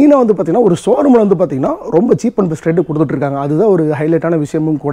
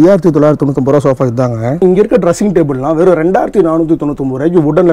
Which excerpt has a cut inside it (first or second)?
second